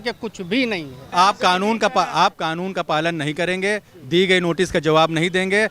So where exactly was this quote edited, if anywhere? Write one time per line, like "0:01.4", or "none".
0:01.0